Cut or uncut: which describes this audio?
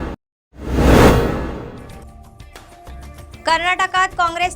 cut